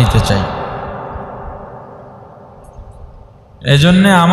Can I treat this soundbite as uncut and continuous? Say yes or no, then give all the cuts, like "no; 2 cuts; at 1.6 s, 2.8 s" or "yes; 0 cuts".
yes; 0 cuts